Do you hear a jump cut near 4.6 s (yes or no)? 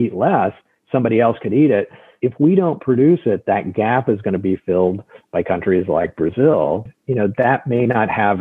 no